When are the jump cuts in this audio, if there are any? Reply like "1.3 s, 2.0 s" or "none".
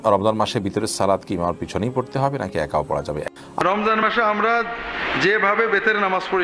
3.6 s